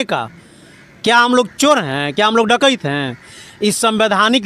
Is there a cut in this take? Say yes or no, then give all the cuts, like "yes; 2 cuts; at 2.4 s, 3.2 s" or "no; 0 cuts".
no; 0 cuts